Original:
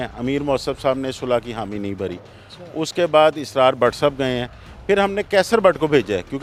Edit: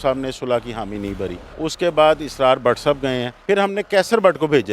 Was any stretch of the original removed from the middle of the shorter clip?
yes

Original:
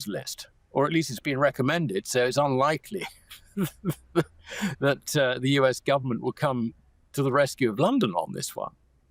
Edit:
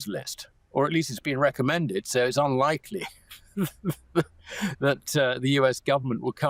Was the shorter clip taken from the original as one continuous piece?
yes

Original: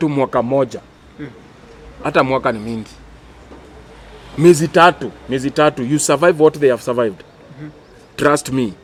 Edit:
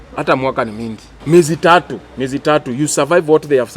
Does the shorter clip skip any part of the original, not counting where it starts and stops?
yes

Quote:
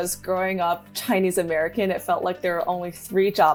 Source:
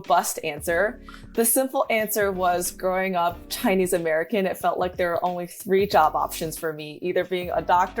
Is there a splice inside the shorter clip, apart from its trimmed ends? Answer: no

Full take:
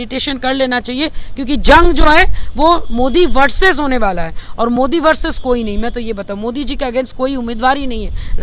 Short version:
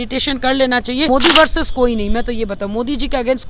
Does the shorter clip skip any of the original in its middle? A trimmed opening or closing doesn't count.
yes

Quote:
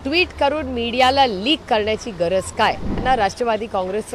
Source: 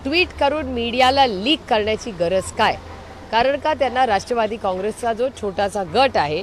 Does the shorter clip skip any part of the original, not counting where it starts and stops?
yes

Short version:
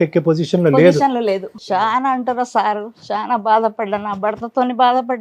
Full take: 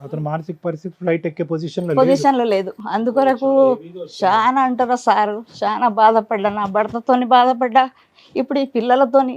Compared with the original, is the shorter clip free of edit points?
no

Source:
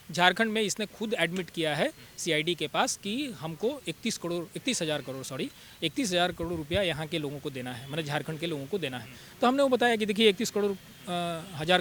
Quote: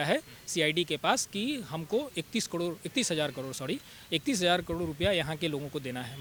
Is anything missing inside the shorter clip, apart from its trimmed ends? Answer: no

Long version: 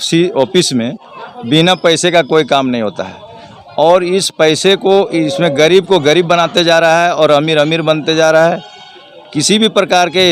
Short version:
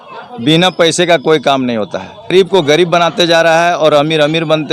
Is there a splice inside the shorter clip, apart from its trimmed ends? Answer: yes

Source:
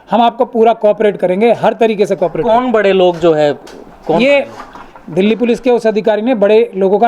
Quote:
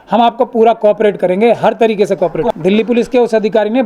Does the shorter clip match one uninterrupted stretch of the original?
no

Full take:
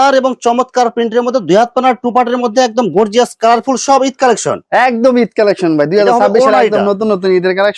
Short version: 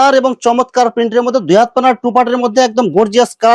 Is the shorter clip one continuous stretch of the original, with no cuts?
yes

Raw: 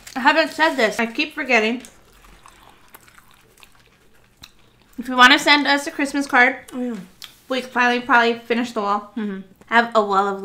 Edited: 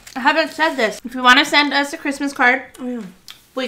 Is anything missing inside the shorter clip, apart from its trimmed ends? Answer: yes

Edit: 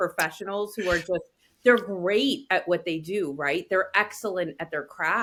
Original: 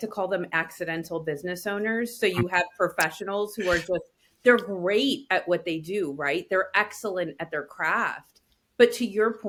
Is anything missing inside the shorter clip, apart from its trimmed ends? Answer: no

